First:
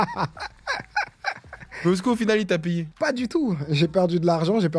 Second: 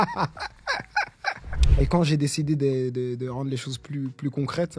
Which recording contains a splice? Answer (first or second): second